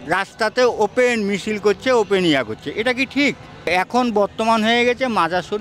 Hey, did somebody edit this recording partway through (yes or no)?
yes